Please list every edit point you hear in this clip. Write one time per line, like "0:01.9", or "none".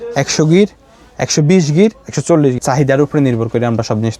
0:02.6